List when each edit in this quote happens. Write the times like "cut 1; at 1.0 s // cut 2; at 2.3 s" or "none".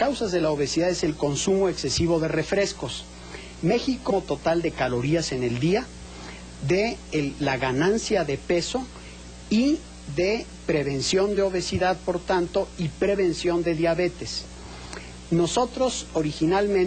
none

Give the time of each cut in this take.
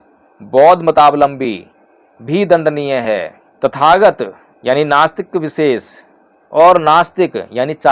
none

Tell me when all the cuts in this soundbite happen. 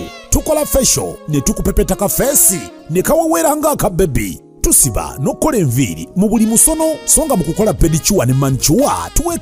none

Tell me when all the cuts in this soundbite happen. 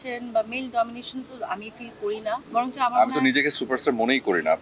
none

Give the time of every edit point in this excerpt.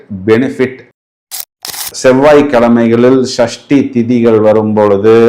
cut 1; at 1.6 s

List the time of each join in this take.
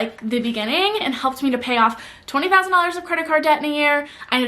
cut 1; at 1.0 s

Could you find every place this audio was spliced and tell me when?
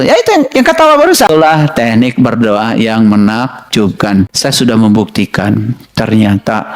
cut 1; at 1.3 s // cut 2; at 4.3 s

